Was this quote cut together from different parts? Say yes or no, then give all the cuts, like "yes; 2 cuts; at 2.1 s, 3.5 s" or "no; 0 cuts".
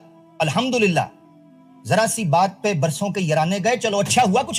no; 0 cuts